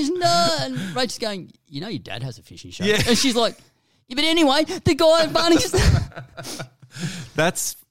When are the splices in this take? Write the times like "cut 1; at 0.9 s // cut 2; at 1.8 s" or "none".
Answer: none